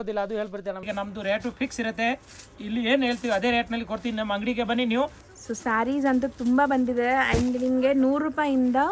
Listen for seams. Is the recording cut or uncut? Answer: cut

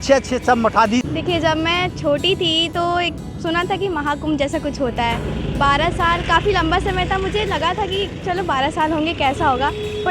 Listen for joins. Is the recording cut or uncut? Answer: cut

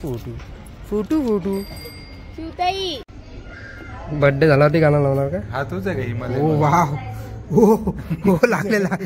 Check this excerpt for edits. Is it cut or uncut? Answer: cut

